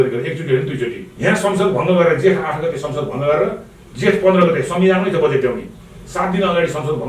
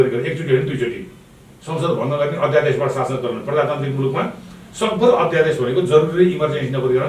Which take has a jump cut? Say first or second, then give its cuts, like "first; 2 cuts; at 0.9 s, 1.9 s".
first; 1 cut; at 1.0 s